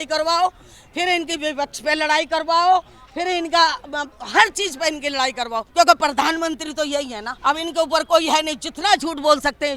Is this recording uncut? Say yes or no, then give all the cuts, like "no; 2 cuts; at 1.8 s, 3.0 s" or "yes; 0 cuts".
no; 2 cuts; at 5.6 s, 7.2 s